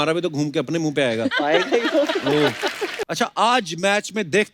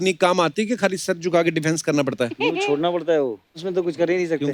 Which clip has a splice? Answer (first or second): first